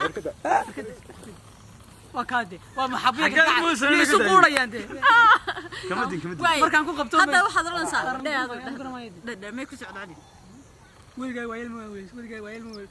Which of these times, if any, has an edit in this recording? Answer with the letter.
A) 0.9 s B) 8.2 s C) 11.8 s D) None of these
B